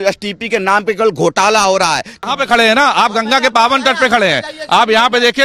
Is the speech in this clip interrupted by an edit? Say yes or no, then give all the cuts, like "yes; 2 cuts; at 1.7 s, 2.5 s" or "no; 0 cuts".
yes; 1 cut; at 2.2 s